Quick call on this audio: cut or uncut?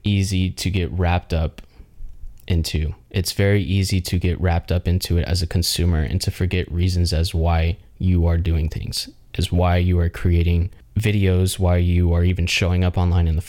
uncut